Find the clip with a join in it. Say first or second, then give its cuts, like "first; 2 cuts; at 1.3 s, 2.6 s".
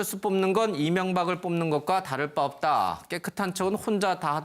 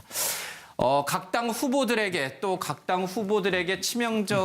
first; 1 cut; at 1.7 s